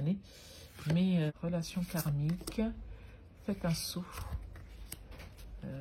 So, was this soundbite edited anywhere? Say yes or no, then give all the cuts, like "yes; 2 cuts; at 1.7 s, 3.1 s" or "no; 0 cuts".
yes; 1 cut; at 1.3 s